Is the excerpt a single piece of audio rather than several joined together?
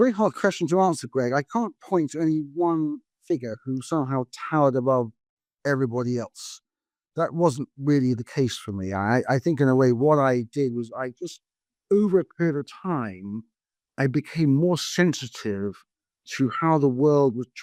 yes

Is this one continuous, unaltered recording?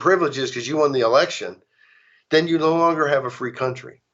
yes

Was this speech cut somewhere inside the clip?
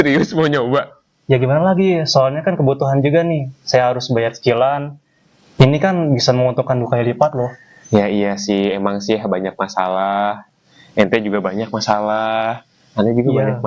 no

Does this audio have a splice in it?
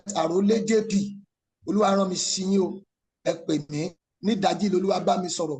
yes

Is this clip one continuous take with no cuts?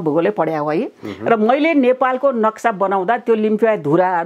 yes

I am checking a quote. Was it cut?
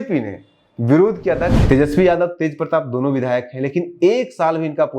yes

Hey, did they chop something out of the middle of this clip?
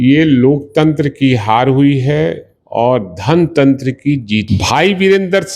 yes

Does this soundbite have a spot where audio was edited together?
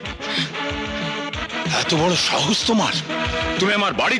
no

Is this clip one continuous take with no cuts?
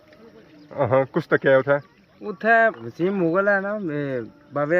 no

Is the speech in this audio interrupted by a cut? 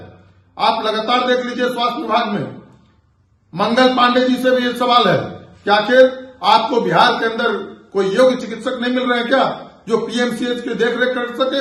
no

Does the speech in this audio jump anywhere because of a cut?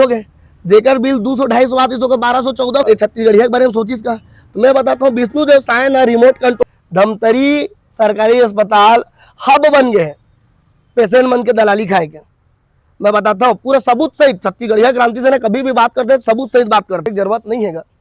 yes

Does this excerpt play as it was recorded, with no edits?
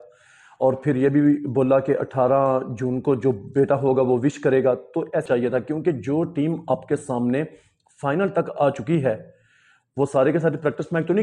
no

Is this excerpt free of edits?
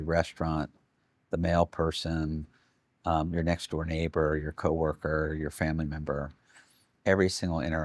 yes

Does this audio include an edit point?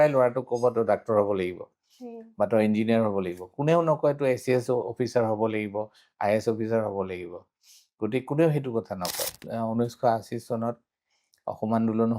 yes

